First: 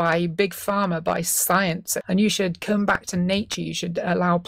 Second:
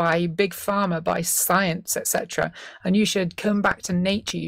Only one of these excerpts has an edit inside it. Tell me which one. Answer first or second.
first